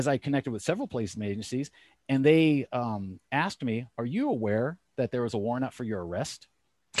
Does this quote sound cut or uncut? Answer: uncut